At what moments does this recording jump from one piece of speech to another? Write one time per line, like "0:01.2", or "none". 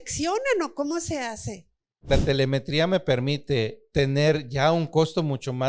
0:02.1
0:03.8